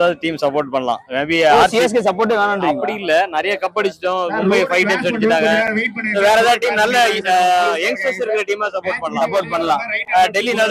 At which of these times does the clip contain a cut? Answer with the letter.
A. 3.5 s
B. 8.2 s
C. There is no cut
C